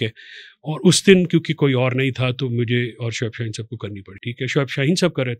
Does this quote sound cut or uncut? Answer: cut